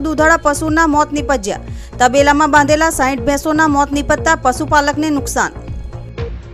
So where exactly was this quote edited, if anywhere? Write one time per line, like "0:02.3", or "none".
0:05.5